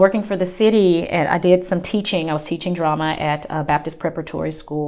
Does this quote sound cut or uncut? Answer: uncut